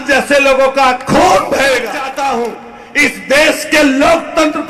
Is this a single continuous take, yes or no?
no